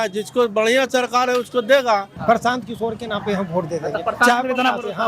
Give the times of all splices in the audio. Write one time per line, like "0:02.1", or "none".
0:02.1